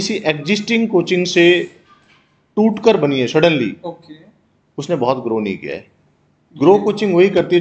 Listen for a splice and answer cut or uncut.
uncut